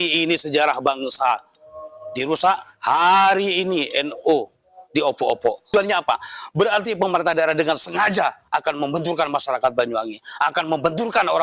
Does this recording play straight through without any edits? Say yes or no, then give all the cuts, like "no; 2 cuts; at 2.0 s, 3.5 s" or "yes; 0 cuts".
no; 1 cut; at 5.7 s